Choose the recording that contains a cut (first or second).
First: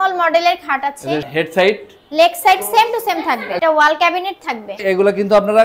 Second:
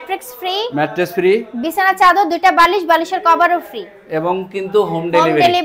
first